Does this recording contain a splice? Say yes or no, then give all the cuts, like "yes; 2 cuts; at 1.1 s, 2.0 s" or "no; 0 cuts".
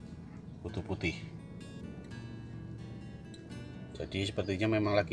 no; 0 cuts